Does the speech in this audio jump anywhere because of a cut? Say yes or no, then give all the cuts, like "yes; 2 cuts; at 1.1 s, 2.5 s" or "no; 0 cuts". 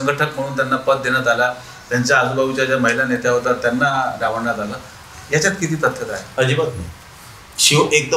no; 0 cuts